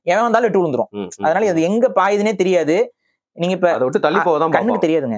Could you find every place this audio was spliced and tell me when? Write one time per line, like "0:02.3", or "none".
none